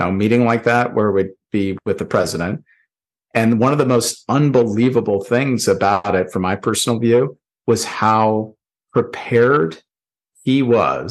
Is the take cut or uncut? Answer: uncut